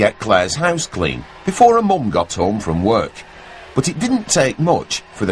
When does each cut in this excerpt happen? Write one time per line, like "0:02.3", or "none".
0:04.1